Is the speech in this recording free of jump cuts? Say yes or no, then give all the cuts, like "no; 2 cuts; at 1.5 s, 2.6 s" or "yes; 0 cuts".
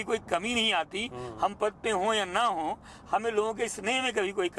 yes; 0 cuts